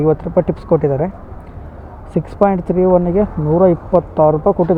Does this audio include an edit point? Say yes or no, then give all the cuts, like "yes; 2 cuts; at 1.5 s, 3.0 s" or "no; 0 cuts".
no; 0 cuts